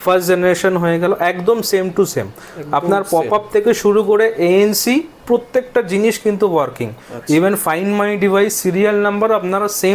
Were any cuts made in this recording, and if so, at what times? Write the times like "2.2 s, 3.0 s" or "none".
none